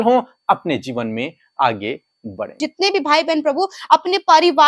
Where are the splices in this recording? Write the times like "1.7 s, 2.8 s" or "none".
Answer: 2.7 s